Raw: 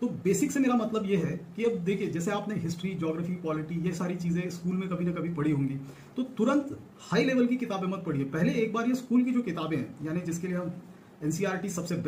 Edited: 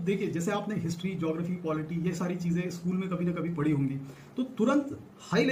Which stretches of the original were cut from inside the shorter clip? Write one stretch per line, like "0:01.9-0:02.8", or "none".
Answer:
none